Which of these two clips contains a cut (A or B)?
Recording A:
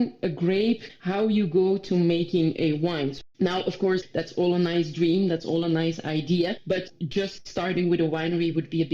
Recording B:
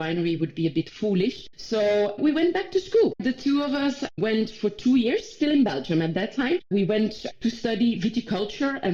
A